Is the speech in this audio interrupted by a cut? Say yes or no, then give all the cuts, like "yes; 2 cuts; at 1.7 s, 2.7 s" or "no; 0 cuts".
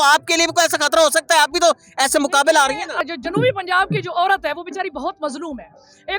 yes; 1 cut; at 3.0 s